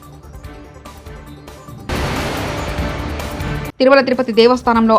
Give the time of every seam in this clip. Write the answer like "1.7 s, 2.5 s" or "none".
1.7 s, 3.5 s